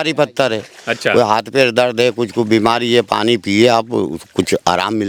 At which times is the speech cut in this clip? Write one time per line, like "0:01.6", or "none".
none